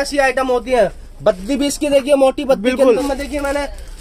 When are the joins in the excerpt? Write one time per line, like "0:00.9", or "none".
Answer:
0:03.0